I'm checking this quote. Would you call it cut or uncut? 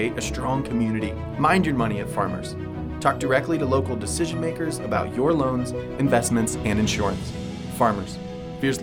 uncut